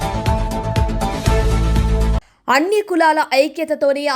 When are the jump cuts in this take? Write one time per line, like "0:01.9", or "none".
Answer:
0:02.3